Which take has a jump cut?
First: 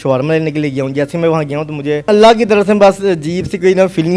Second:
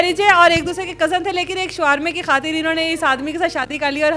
first; 1 cut; at 2.1 s

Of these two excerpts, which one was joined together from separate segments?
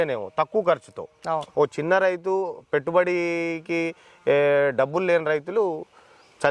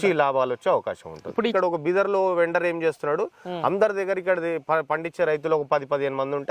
second; 1 cut; at 1.5 s

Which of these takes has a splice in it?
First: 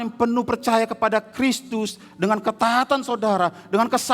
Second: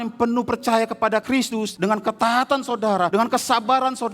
second; 2 cuts; at 1.4 s, 3.1 s

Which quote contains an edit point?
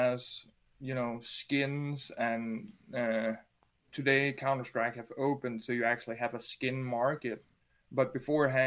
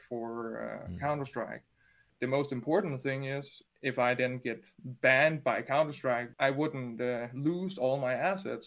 second; 2 cuts; at 2.1 s, 6.3 s

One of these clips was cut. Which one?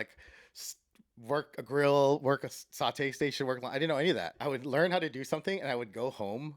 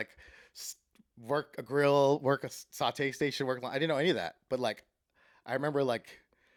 first; 1 cut; at 4.3 s

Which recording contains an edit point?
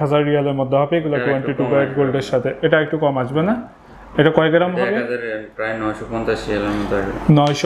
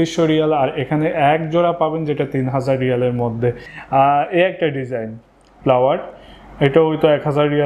second; 1 cut; at 3.7 s

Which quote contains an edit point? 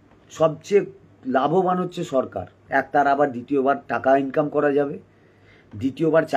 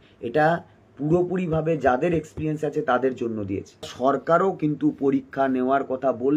second; 1 cut; at 3.9 s

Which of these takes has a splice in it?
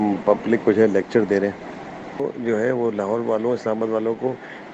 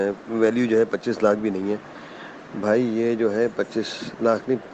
first; 1 cut; at 2.2 s

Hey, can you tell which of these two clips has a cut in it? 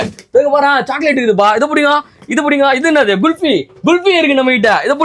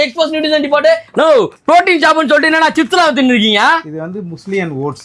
second; 1 cut; at 1.0 s

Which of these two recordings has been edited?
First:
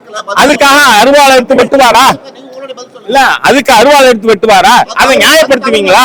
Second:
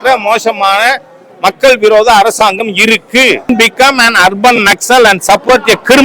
second; 1 cut; at 3.5 s

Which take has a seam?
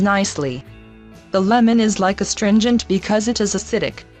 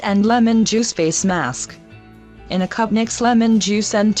first; 1 cut; at 1.3 s

